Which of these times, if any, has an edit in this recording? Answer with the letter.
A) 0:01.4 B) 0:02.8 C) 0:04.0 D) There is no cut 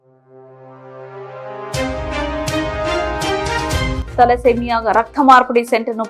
C